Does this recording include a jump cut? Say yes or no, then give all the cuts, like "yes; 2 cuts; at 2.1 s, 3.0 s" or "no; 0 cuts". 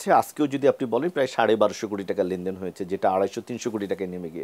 no; 0 cuts